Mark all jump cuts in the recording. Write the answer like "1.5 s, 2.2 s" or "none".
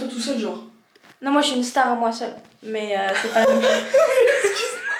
none